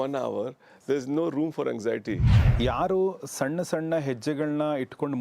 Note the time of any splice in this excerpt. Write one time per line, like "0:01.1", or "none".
0:02.3

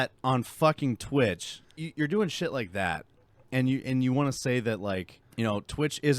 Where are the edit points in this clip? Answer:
0:01.8
0:05.2

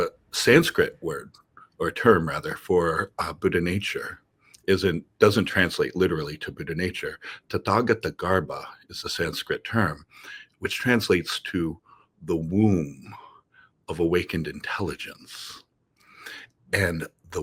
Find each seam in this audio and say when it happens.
none

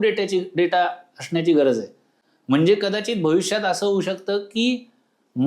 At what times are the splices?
none

